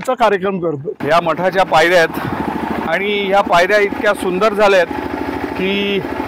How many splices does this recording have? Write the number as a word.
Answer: one